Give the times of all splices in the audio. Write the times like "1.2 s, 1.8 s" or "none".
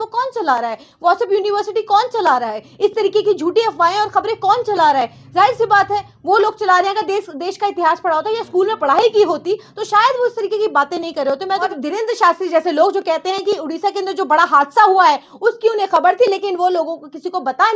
11.8 s